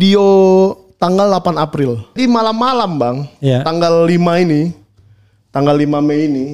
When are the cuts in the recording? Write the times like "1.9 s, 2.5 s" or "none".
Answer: 2.2 s